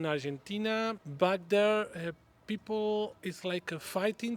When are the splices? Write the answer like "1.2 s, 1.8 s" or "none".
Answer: 1.0 s, 3.2 s